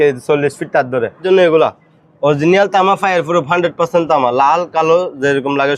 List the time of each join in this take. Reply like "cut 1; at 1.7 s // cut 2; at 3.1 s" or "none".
cut 1; at 1.2 s